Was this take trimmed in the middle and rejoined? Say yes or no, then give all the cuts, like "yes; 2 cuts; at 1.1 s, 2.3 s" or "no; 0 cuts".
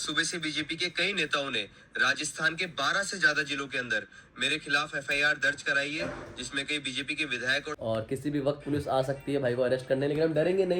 no; 0 cuts